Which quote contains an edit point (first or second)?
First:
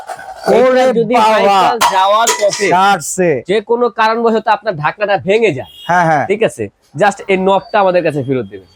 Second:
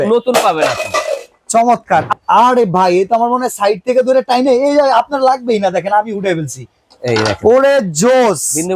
second